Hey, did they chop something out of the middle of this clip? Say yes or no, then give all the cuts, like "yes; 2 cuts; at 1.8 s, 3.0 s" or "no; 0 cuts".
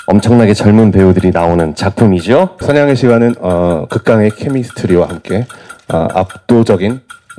yes; 1 cut; at 2.6 s